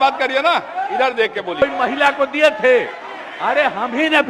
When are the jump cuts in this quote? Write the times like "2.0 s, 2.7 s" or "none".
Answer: 1.6 s